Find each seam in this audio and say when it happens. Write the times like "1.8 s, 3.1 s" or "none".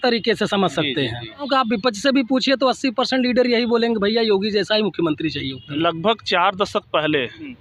1.5 s, 5.6 s